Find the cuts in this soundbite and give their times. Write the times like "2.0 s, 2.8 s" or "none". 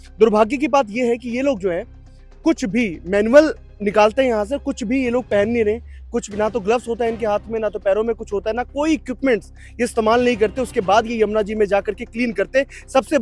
none